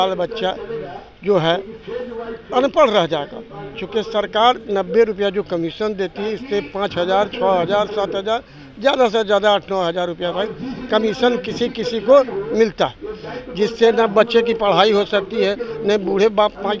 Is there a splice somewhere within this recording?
no; 0 cuts

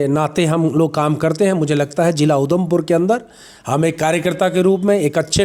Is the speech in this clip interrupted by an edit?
no; 0 cuts

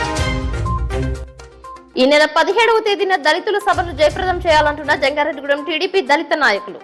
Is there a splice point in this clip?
no; 0 cuts

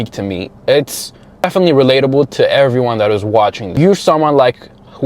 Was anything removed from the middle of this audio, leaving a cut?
yes; 2 cuts; at 1.4 s, 3.6 s

